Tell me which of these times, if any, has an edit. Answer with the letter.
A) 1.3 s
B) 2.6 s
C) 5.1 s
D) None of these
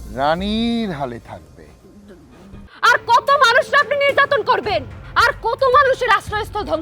B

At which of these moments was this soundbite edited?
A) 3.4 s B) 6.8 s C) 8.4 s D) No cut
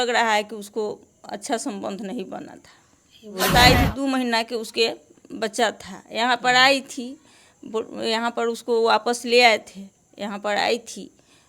A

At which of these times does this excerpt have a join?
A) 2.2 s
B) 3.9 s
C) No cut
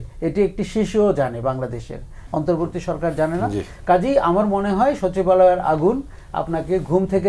A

